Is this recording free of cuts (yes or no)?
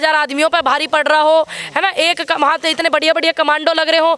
yes